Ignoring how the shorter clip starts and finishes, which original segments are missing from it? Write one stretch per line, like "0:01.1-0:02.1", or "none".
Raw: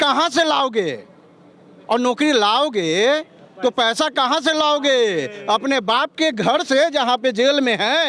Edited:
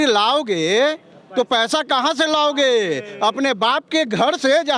none